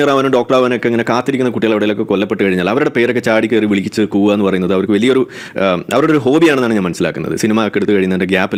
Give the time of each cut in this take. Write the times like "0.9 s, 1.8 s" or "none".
none